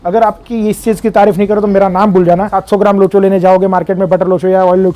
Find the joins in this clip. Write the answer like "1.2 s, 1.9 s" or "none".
2.6 s